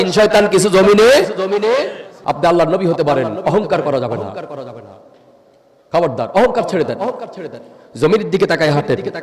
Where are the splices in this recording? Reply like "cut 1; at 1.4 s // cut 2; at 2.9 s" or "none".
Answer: cut 1; at 2.1 s